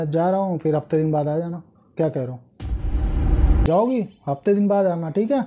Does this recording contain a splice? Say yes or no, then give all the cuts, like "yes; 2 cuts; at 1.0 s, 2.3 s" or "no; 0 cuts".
yes; 1 cut; at 3.6 s